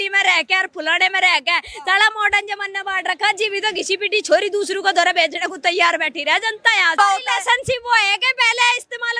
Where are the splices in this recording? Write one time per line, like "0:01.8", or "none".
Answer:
0:07.0